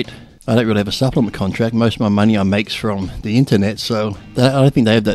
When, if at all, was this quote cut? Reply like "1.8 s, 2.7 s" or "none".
4.2 s